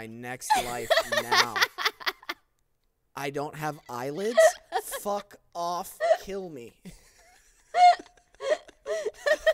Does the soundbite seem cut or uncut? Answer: uncut